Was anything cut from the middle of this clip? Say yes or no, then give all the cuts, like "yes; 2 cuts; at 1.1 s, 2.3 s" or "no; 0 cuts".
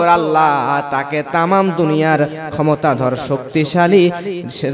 no; 0 cuts